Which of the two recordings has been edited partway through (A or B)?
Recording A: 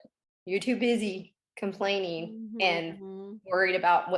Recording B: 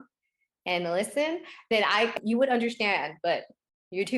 B